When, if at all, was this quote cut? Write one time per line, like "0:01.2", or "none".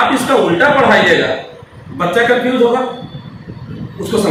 none